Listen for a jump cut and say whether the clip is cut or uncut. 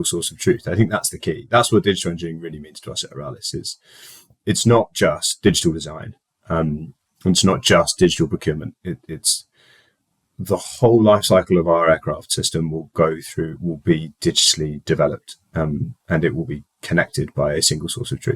uncut